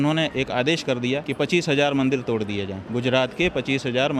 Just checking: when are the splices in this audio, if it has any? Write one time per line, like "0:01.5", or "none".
0:01.3
0:02.8